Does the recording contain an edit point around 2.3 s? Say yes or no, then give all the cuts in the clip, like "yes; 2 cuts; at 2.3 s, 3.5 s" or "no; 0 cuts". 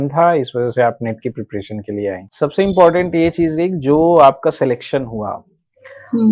yes; 1 cut; at 2.3 s